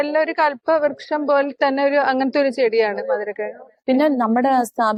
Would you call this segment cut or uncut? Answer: uncut